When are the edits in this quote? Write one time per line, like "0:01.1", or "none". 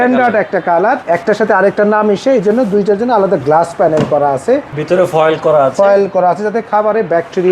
0:01.0
0:04.7